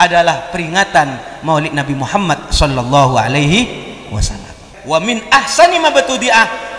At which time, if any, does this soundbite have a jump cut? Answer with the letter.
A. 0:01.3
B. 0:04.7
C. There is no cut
B